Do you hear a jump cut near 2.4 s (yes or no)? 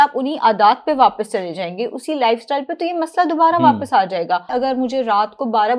no